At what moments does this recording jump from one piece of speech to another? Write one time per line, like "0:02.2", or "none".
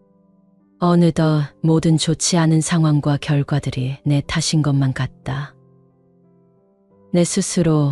0:05.5
0:07.1